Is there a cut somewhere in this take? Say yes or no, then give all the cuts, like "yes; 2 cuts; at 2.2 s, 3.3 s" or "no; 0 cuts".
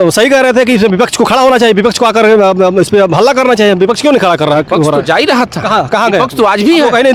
no; 0 cuts